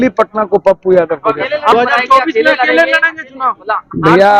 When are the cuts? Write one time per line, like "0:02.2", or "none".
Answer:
0:01.7